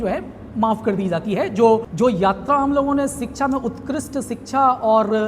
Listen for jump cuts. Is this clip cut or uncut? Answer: cut